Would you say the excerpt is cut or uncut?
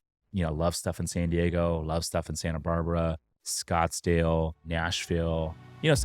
cut